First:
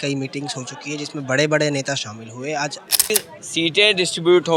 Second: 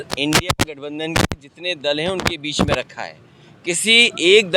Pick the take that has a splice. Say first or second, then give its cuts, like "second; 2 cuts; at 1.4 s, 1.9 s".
first; 1 cut; at 3.1 s